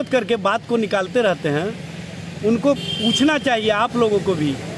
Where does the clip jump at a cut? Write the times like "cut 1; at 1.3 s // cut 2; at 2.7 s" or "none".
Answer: none